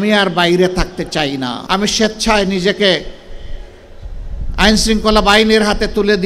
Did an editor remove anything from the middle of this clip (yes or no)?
yes